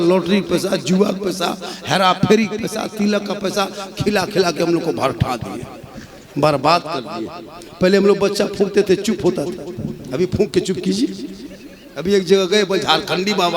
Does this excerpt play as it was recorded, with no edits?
yes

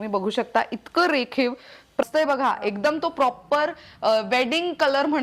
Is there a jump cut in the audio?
yes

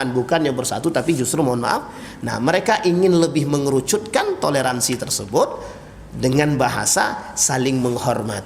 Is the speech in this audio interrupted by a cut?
no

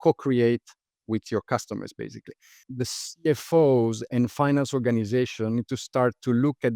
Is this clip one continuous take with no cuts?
no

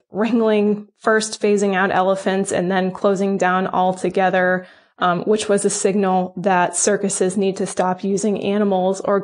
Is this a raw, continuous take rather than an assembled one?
yes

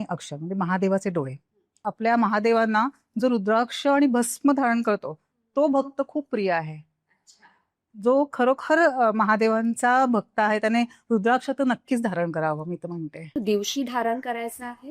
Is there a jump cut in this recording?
yes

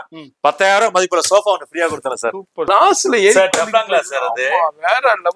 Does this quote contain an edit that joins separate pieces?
yes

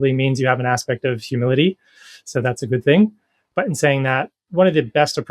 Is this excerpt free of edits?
no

